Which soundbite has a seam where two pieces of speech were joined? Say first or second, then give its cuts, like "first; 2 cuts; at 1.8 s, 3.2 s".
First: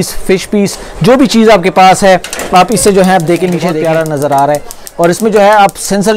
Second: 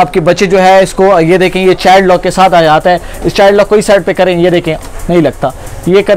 first; 1 cut; at 3.8 s